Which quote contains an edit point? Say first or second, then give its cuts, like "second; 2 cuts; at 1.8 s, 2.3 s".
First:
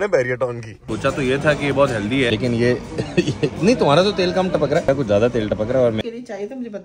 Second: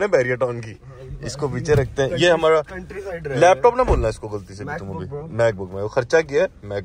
first; 4 cuts; at 0.9 s, 2.3 s, 4.9 s, 6.0 s